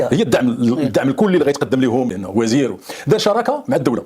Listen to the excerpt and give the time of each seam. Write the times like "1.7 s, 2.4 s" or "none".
2.1 s